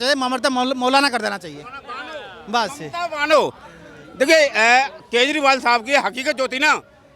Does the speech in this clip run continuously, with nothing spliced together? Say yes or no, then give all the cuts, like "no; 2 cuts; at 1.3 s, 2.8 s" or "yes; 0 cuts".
yes; 0 cuts